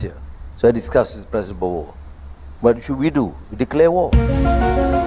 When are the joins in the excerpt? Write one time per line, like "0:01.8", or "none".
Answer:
none